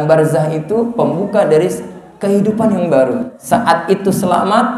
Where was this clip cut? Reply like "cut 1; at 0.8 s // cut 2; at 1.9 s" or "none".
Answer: cut 1; at 3.3 s